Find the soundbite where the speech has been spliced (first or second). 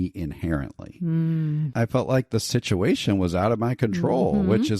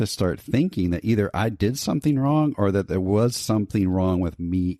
first